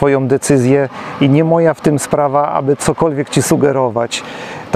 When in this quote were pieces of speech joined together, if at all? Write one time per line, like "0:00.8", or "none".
none